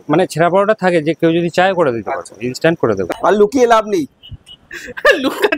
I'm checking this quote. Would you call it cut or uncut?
cut